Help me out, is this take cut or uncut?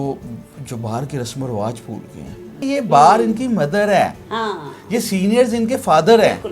cut